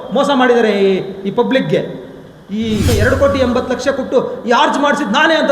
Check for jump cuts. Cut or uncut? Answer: cut